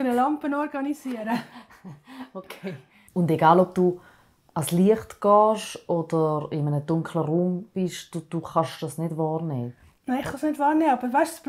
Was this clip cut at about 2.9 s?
yes; 1 cut; at 2.9 s

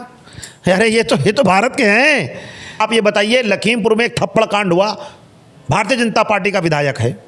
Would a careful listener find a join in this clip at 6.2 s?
no; 1 cut; at 2.8 s

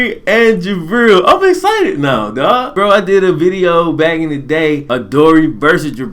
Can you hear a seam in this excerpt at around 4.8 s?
yes; 2 cuts; at 2.8 s, 4.8 s

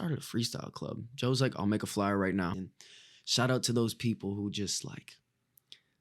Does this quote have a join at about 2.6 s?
yes; 1 cut; at 2.6 s

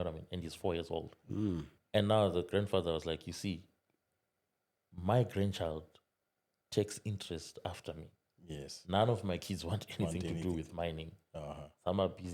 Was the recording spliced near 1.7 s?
no; 0 cuts

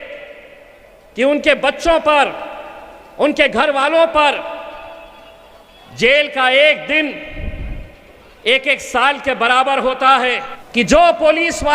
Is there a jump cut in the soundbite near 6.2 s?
no; 1 cut; at 10.5 s

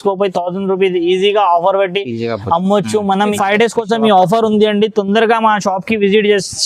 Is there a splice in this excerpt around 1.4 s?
no; 1 cut; at 3.4 s

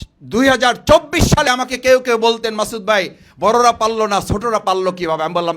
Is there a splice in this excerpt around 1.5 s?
yes; 1 cut; at 1.5 s

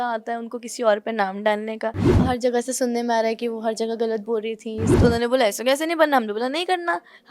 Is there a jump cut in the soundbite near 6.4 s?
no; 2 cuts; at 2.2 s, 4.9 s

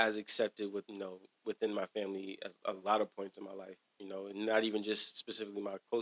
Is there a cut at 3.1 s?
no; 1 cut; at 0.9 s

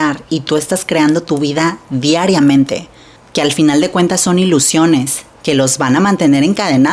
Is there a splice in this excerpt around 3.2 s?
yes; 1 cut; at 3.2 s

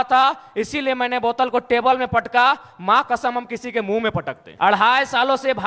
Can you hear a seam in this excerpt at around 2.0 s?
no; 1 cut; at 4.4 s

